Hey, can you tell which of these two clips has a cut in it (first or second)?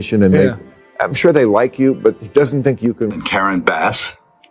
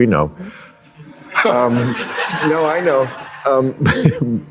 first